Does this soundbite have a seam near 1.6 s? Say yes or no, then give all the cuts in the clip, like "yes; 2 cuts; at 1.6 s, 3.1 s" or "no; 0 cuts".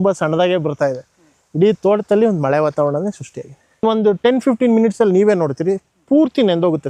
no; 1 cut; at 3.8 s